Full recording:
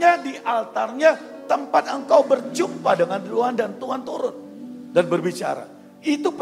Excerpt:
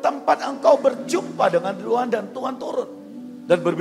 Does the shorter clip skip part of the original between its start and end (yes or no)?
no